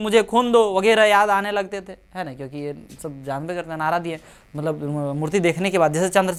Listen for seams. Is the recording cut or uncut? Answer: uncut